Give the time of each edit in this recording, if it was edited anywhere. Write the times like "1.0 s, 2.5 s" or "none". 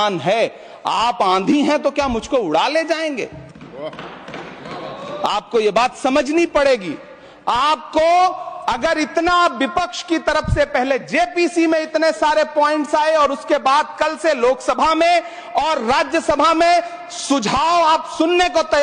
none